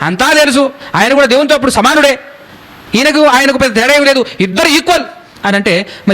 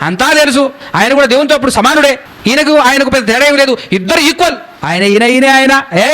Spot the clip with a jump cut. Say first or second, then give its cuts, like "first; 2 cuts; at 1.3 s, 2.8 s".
second; 2 cuts; at 2.3 s, 4.7 s